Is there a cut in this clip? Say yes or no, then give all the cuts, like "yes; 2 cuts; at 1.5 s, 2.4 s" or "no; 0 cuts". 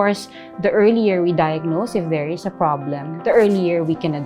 no; 0 cuts